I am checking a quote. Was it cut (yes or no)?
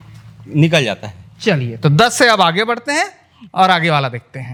no